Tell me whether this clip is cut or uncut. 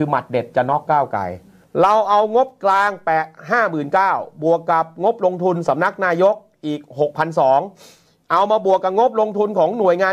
cut